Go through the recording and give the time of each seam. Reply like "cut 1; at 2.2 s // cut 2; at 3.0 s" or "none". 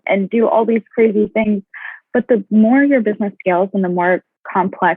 cut 1; at 1.4 s